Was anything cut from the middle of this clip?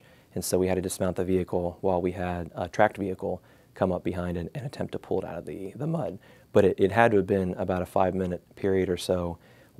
no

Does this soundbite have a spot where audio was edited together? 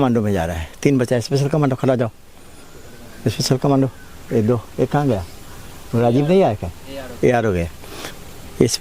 no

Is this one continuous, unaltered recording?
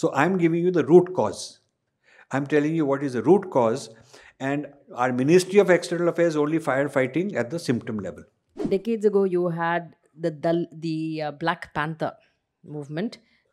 no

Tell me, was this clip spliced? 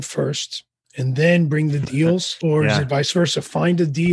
yes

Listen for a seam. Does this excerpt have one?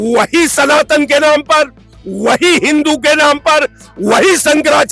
no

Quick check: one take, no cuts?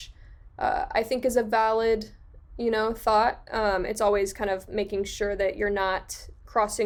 yes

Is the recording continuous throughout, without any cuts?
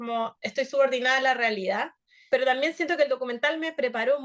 no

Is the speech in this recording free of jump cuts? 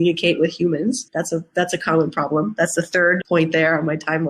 no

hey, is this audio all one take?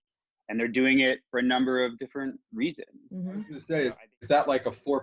no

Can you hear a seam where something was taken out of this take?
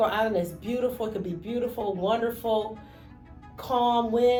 no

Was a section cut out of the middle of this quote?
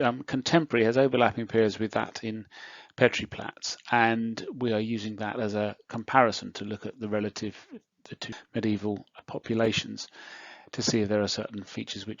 yes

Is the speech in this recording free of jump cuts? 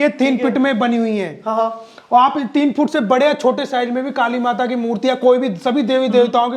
yes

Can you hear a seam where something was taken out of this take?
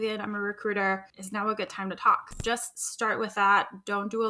yes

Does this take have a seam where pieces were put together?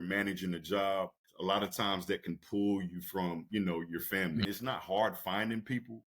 yes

